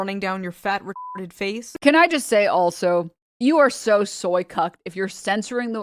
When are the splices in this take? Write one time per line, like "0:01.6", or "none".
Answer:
0:01.7

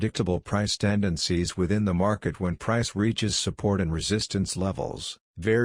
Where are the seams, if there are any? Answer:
none

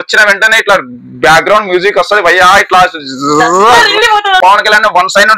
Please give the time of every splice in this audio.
0:04.3

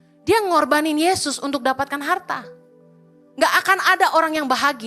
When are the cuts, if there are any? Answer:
none

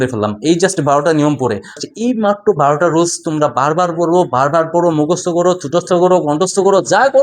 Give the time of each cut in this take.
0:01.8

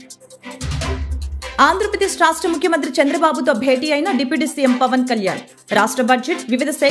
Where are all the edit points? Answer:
0:01.5

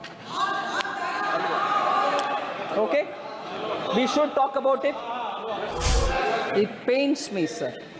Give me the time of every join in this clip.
0:05.7

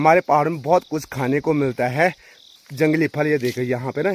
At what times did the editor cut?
none

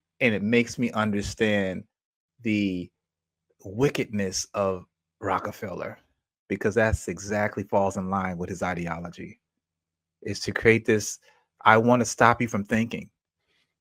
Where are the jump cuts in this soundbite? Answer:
none

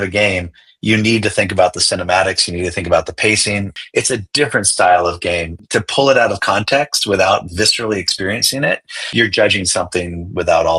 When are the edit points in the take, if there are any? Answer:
0:03.7
0:05.5
0:09.1

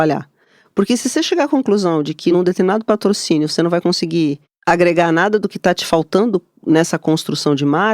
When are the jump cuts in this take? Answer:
0:02.3
0:04.5

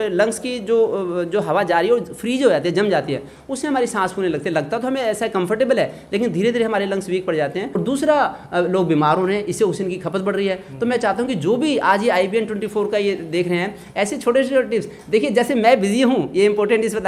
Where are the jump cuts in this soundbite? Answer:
0:07.7

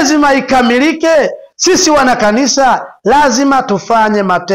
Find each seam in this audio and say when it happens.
none

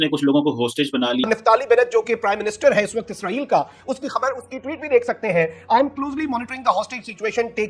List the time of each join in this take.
0:01.2

